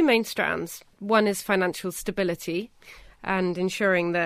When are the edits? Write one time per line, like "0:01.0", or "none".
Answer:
0:00.9